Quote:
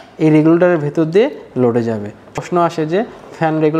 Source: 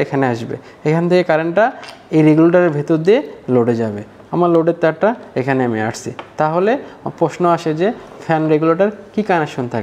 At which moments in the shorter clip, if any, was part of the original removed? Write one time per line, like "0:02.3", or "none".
0:02.4